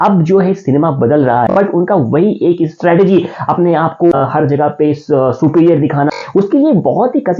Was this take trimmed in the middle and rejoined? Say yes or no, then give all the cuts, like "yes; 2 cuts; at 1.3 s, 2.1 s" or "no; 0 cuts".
yes; 2 cuts; at 1.5 s, 6.1 s